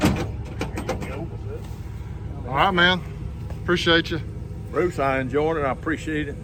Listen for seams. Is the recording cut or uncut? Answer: uncut